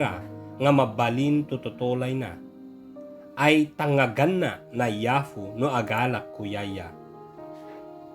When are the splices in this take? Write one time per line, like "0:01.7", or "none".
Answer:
0:06.9